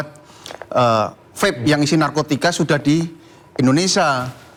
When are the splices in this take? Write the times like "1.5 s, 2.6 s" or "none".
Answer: none